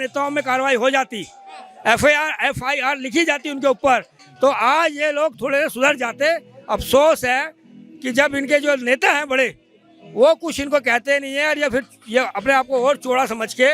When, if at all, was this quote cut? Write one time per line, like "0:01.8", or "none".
none